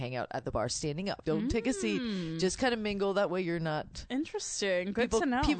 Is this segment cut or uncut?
cut